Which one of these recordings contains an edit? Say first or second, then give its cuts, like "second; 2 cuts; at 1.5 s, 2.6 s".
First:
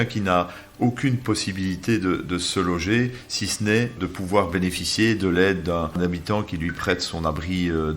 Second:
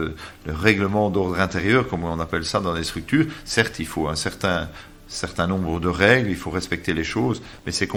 first; 2 cuts; at 3.9 s, 6.0 s